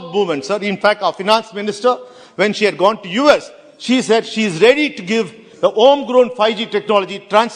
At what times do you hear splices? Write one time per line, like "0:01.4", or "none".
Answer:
none